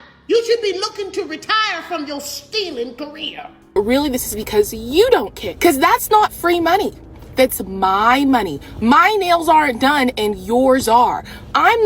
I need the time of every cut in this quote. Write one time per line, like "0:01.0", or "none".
0:03.8
0:05.4